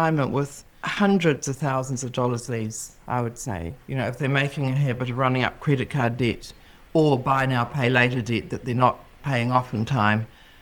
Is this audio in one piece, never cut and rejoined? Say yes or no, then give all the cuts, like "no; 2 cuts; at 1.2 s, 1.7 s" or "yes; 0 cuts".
yes; 0 cuts